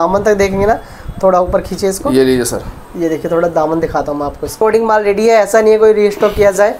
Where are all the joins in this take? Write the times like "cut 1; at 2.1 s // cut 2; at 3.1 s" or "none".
cut 1; at 4.6 s